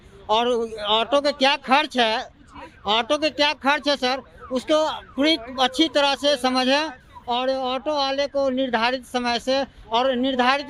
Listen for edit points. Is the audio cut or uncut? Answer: uncut